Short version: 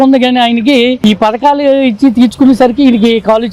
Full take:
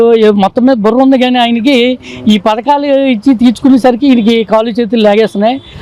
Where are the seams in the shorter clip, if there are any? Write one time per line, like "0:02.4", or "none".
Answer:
0:01.0